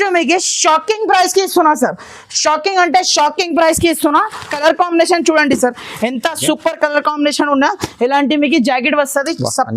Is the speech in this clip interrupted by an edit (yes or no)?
yes